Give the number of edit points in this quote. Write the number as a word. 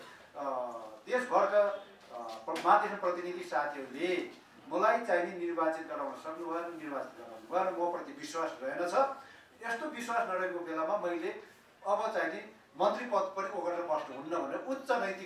zero